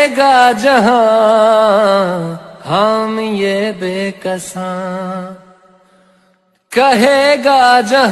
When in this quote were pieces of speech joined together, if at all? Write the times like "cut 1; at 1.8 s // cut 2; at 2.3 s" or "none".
cut 1; at 6.9 s